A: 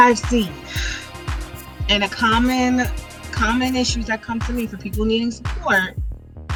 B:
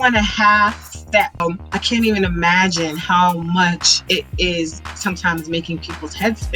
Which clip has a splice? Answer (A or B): B